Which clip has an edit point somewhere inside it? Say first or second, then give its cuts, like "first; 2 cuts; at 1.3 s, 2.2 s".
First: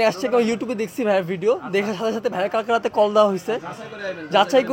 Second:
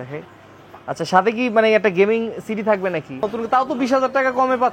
second; 1 cut; at 3.2 s